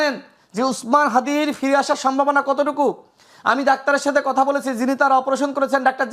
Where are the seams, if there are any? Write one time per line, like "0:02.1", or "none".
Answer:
none